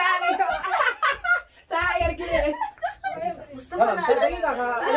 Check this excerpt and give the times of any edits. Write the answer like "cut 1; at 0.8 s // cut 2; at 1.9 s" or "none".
cut 1; at 3.4 s